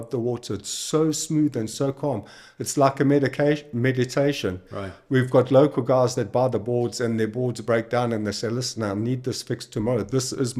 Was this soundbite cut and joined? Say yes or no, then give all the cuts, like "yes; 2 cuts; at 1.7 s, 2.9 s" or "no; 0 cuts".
no; 0 cuts